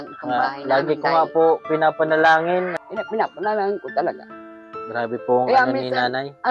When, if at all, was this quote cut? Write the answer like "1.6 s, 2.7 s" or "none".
2.8 s